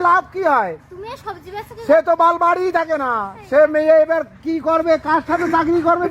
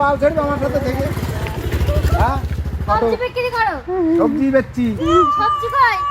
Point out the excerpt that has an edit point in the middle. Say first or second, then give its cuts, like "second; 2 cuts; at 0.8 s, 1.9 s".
second; 1 cut; at 2.9 s